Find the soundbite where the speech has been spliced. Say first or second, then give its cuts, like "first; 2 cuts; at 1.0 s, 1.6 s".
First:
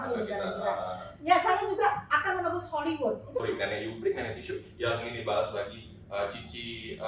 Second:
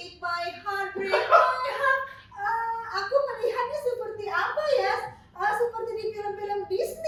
first; 1 cut; at 3.4 s